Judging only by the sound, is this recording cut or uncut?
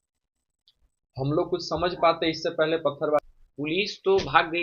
cut